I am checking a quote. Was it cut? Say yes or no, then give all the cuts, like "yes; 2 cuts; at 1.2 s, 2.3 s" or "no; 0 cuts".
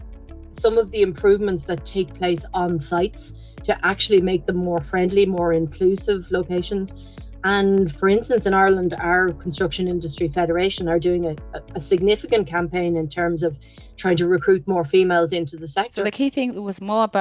yes; 1 cut; at 16.0 s